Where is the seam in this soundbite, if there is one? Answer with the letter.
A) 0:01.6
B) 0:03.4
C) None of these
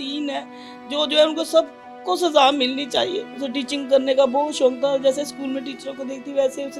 B